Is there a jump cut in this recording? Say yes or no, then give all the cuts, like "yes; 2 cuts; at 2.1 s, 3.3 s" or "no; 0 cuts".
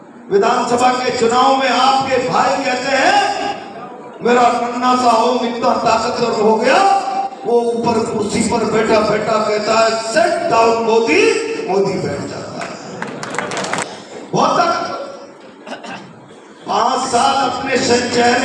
yes; 1 cut; at 13.8 s